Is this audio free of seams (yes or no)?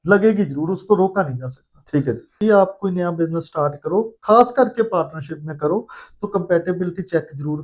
no